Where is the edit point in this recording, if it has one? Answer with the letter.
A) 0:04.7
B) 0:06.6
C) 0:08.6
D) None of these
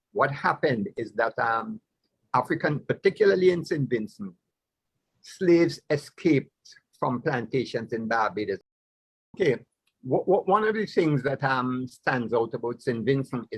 C